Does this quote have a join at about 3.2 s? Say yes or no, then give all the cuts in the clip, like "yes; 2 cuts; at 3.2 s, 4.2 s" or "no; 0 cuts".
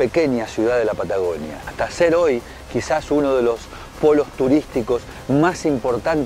no; 1 cut; at 1.7 s